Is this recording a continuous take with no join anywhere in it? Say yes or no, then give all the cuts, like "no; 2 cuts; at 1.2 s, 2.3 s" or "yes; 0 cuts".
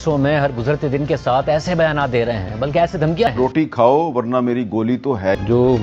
yes; 0 cuts